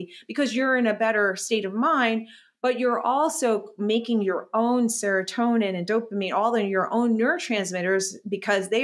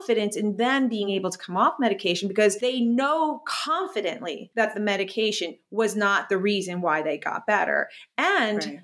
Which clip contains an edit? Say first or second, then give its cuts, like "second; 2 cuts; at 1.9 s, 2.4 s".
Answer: second; 2 cuts; at 1.1 s, 2.6 s